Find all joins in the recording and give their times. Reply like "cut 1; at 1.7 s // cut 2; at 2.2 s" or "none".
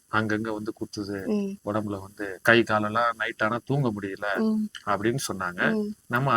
cut 1; at 2.2 s